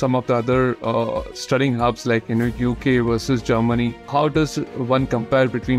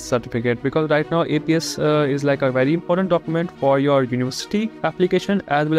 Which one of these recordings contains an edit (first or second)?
first